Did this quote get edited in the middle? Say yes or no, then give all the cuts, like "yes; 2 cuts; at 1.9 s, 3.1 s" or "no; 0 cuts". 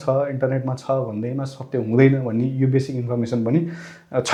no; 0 cuts